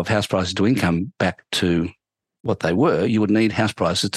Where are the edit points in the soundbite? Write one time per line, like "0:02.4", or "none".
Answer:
none